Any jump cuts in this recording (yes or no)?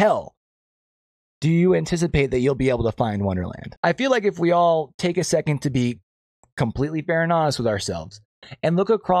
no